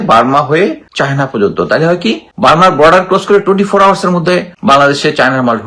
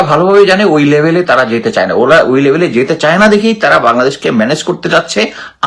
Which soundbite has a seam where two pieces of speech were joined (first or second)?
first